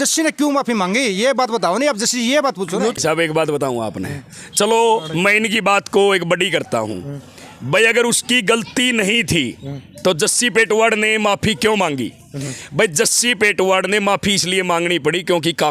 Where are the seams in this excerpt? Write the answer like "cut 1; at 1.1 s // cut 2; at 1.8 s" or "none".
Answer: none